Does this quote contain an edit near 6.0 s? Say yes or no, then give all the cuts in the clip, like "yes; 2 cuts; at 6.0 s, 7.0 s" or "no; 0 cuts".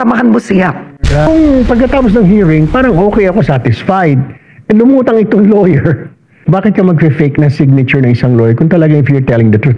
no; 1 cut; at 1.3 s